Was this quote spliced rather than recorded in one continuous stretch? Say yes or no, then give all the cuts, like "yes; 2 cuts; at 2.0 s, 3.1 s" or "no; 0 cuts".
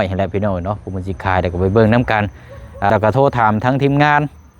yes; 1 cut; at 2.9 s